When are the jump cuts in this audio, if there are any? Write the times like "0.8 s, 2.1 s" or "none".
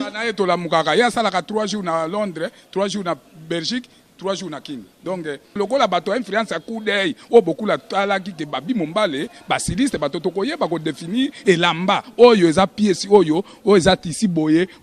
5.6 s